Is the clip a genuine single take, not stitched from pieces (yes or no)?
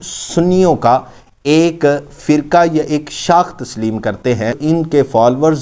no